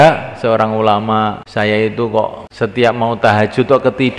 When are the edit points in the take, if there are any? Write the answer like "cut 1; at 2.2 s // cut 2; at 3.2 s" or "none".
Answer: cut 1; at 1.4 s // cut 2; at 2.4 s